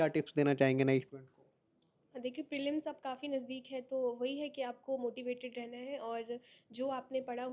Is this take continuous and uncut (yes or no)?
yes